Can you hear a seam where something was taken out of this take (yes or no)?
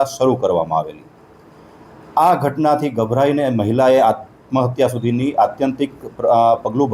no